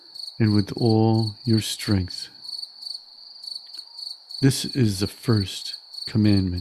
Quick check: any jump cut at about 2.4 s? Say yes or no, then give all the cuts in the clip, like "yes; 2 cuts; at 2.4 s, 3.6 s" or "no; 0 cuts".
yes; 2 cuts; at 2.4 s, 4.4 s